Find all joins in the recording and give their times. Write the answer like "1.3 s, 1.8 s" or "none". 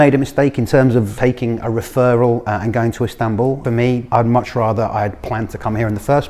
1.1 s, 3.8 s